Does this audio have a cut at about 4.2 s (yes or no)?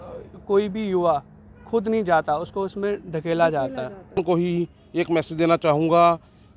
yes